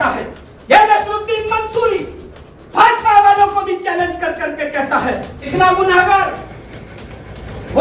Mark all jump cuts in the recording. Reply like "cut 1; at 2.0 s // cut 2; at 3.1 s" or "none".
cut 1; at 5.5 s